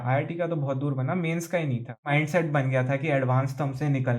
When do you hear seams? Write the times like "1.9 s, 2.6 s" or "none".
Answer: 2.1 s

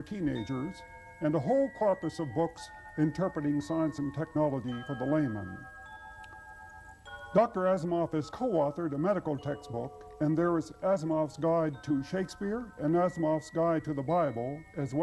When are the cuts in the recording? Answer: none

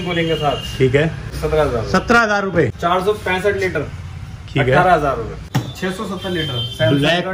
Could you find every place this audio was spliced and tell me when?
1.4 s, 2.8 s, 5.4 s

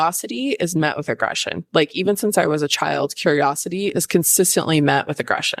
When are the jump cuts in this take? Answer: 1.6 s

